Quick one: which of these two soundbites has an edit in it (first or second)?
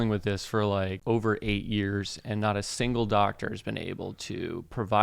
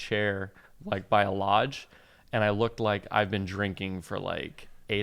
first